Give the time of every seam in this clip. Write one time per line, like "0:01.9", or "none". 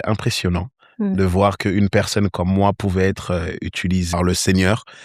0:04.1